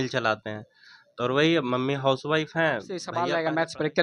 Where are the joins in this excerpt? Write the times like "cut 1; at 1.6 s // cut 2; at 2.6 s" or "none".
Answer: cut 1; at 3.1 s